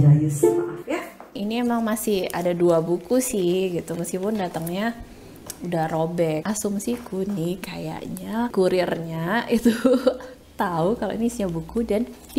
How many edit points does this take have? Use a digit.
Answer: 3